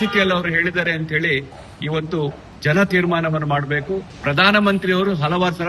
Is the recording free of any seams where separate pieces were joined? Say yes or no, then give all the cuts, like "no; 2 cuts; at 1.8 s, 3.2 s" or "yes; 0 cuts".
no; 1 cut; at 4.1 s